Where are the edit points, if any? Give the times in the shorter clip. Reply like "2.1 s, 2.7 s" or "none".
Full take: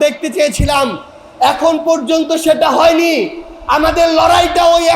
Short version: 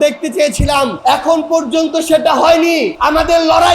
1.0 s, 2.9 s